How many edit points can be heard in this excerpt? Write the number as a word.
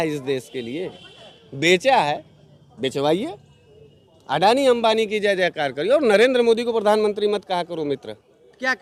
zero